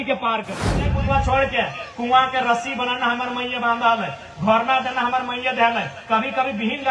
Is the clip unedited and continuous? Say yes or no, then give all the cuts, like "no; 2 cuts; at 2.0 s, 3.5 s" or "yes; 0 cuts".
no; 1 cut; at 1.0 s